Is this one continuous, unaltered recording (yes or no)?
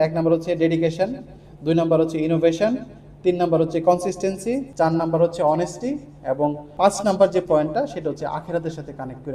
yes